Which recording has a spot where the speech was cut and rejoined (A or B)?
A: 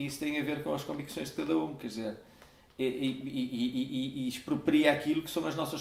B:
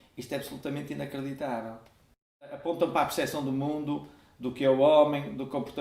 B